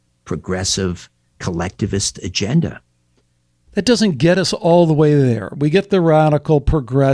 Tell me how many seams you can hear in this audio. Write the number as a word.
one